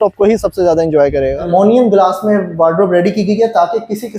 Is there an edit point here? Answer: yes; 1 cut; at 1.5 s

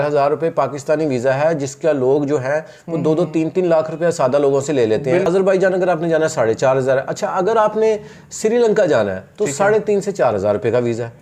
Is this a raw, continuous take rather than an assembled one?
no; 1 cut; at 5.3 s

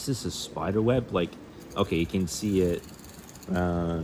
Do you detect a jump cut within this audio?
no; 0 cuts

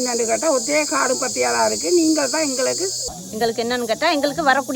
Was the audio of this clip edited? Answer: yes; 1 cut; at 3.0 s

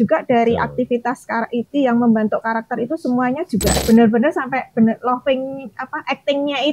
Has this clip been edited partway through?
yes; 1 cut; at 3.8 s

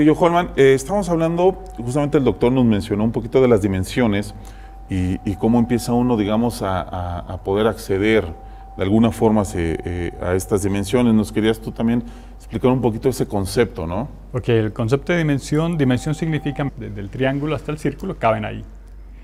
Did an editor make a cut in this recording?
no; 0 cuts

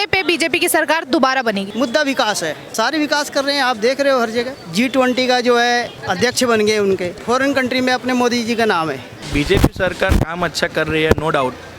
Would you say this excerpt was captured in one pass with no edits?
no; 6 cuts; at 1.7 s, 2.6 s, 4.6 s, 6.0 s, 7.1 s, 9.2 s

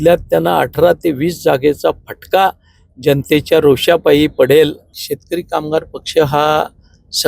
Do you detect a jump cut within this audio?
yes; 1 cut; at 5.0 s

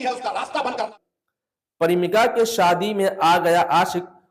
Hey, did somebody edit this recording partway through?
yes; 1 cut; at 0.9 s

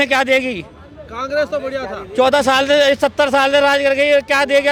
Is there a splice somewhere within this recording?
no; 0 cuts

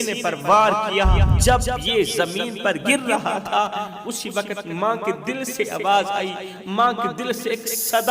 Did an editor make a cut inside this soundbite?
yes; 1 cut; at 1.3 s

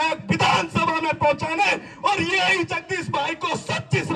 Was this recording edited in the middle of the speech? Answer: no; 0 cuts

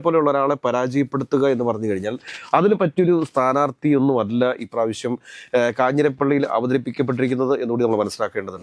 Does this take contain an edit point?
no; 0 cuts

